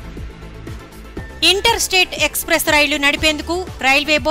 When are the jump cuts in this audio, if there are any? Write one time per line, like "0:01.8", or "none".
0:01.4

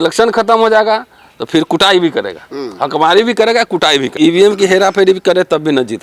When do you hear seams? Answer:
0:04.1

